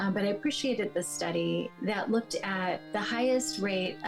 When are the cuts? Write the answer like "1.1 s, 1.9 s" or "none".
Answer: 1.7 s, 2.9 s